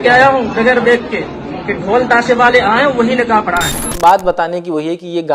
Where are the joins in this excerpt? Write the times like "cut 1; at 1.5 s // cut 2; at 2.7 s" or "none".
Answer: cut 1; at 3.8 s